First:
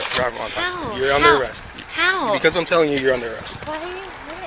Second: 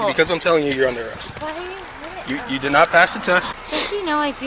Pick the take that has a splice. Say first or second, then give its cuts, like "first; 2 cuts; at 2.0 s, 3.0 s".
second; 1 cut; at 3.5 s